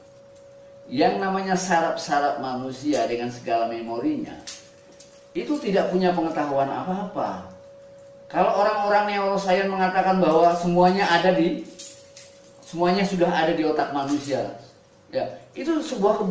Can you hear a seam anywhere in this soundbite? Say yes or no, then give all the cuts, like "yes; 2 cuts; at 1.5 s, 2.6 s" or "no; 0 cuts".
no; 0 cuts